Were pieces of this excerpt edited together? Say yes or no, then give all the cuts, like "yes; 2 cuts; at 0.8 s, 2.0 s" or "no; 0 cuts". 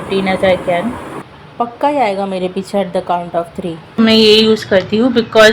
yes; 2 cuts; at 1.1 s, 4.0 s